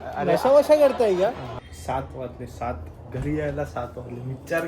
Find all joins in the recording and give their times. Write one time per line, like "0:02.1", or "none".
0:01.5